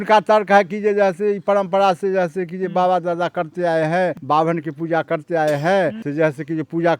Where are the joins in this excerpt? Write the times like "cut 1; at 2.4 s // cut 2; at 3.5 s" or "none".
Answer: cut 1; at 4.2 s // cut 2; at 6.0 s